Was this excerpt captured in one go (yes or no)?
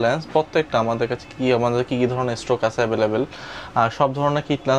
yes